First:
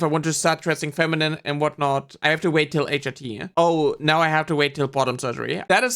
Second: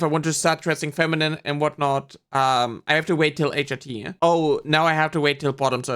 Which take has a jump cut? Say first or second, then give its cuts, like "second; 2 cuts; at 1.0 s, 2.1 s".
first; 1 cut; at 2.1 s